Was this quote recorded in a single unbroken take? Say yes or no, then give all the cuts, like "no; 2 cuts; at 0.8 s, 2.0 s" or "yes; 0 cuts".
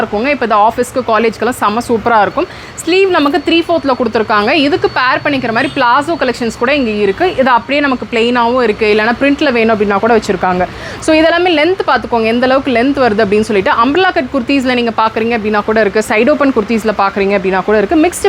yes; 0 cuts